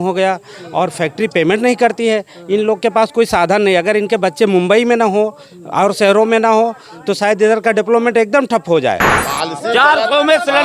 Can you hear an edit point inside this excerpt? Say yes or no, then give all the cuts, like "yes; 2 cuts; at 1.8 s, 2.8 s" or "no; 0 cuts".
yes; 1 cut; at 9.1 s